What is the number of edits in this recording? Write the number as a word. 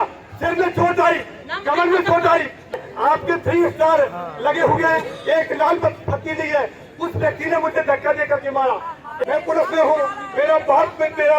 two